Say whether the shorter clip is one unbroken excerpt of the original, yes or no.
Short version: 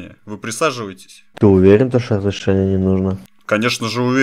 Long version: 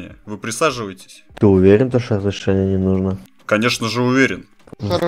yes